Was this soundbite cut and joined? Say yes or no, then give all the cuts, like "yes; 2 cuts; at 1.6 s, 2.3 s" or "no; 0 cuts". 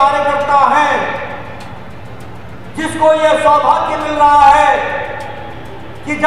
no; 0 cuts